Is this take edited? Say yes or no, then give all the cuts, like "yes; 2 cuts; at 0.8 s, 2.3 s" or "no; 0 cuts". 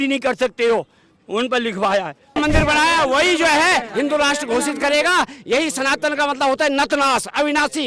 yes; 1 cut; at 2.4 s